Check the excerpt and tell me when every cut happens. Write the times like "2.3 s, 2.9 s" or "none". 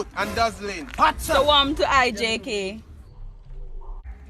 0.9 s